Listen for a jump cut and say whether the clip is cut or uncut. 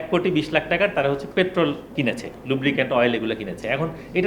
cut